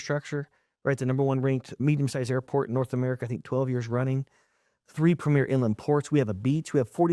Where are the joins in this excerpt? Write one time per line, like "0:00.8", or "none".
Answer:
0:01.8

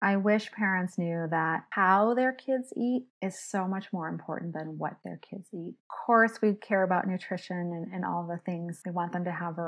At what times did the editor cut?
0:01.7
0:03.1
0:05.9
0:08.8

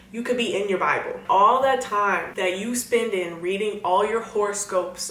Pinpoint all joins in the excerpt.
0:01.2
0:02.3

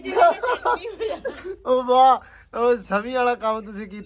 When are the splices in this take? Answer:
none

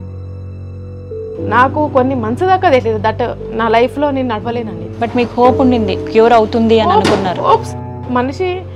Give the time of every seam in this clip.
0:01.5

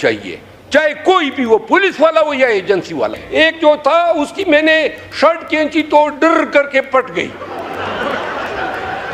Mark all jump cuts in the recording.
0:03.2

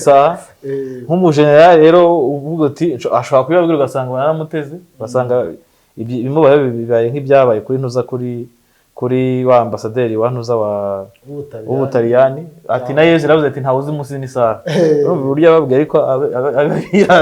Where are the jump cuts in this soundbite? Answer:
none

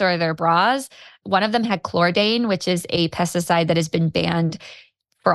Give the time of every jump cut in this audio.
0:01.2

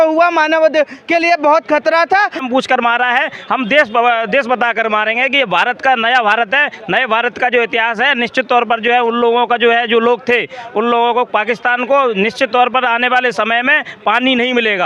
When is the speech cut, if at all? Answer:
0:02.4

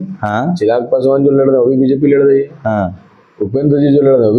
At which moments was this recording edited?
none

